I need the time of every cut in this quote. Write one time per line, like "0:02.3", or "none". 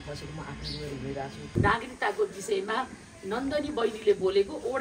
0:01.5

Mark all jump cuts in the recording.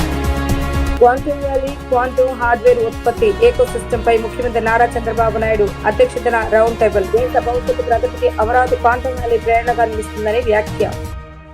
0:00.9

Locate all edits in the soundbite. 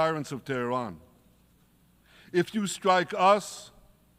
none

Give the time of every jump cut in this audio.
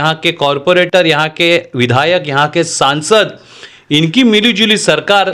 none

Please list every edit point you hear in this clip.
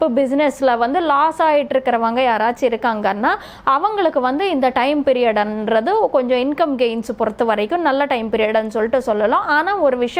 none

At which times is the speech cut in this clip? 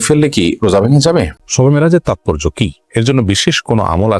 0:01.3

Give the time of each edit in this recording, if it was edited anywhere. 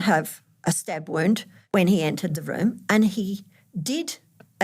0:01.5

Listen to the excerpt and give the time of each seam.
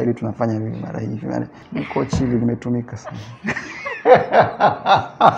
0:01.6

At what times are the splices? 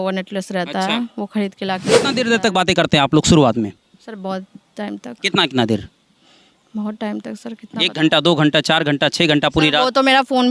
0:01.8

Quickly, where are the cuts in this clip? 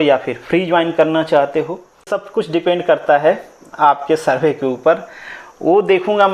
0:02.2

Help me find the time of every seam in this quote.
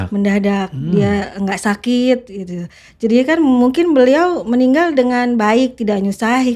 none

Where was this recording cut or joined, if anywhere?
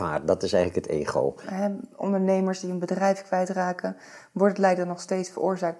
0:01.4

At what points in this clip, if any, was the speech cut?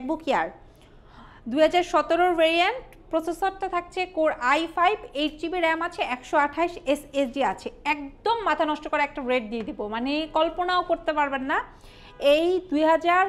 none

